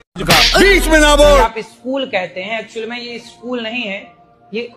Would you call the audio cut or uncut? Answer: cut